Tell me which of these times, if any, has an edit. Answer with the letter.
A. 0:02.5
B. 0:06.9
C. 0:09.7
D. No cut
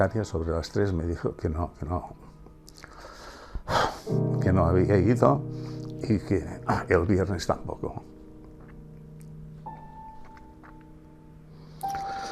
D